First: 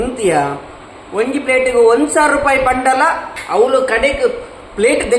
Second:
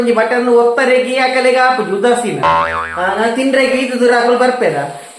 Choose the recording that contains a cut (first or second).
first